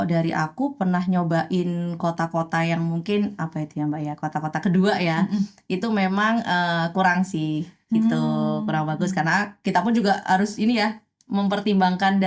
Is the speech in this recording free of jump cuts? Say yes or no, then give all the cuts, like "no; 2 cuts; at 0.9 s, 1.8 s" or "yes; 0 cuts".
yes; 0 cuts